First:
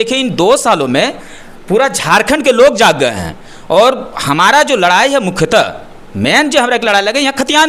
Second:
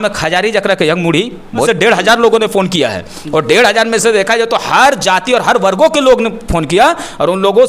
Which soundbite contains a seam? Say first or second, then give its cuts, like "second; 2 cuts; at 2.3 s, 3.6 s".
second; 1 cut; at 1.7 s